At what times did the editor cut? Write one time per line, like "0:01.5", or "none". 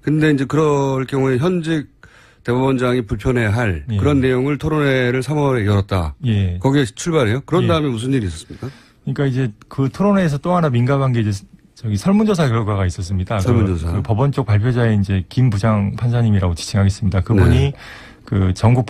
0:11.4

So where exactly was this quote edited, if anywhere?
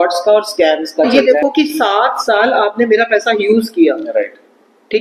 0:01.2

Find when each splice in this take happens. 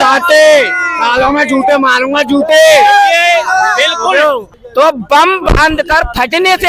0:04.6

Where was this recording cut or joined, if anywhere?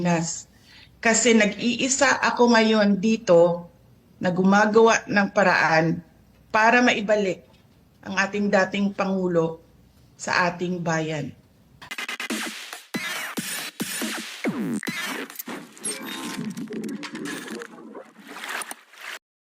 0:11.9

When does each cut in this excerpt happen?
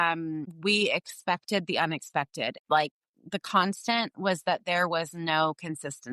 0:02.6

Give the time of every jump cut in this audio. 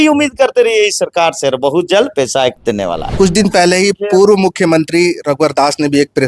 0:03.0

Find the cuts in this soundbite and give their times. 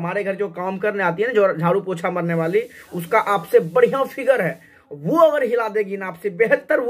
none

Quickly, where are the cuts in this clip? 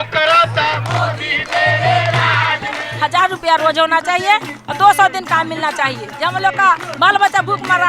0:02.9
0:06.1

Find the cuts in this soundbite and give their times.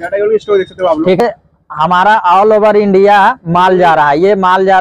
0:01.2

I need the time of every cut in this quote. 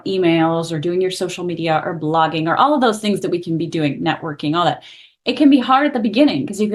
none

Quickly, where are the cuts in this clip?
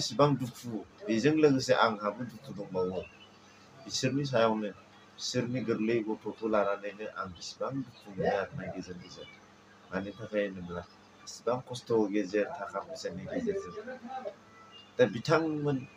none

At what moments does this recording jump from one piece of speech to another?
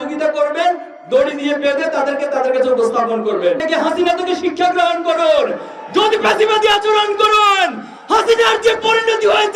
0:03.6

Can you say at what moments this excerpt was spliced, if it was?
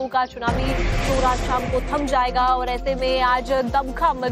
none

